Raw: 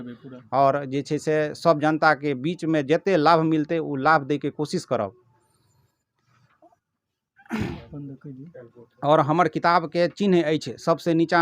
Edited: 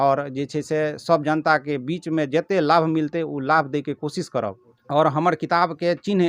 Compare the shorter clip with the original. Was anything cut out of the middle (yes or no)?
yes